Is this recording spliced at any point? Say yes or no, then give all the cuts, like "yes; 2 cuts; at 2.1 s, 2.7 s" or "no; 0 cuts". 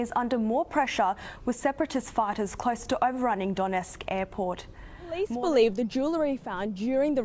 yes; 1 cut; at 5.3 s